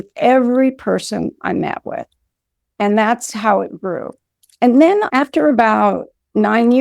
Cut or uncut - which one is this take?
cut